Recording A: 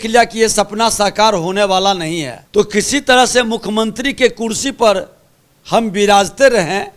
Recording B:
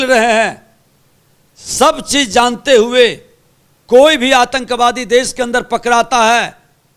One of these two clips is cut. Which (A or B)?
A